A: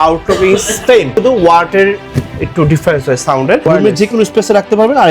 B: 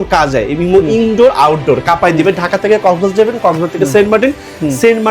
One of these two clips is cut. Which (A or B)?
A